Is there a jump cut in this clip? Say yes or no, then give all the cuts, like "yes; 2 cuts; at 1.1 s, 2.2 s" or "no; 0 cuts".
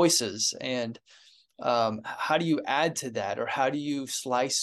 no; 0 cuts